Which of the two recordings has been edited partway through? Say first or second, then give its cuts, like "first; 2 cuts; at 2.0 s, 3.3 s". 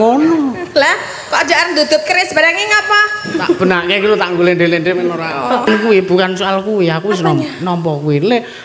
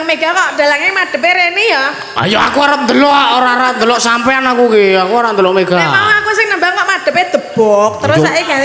first; 1 cut; at 5.7 s